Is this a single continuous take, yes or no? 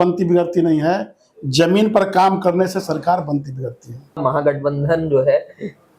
no